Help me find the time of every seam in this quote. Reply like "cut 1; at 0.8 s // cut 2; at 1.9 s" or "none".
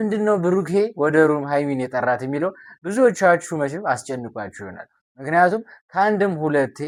none